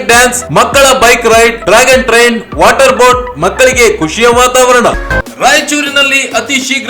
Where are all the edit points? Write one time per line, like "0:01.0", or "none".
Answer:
0:05.0